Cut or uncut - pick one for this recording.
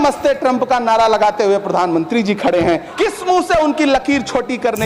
cut